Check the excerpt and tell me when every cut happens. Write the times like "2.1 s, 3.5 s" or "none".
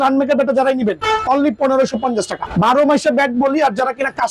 2.5 s